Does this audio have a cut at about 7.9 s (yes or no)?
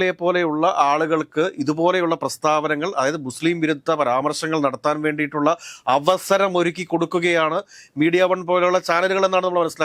no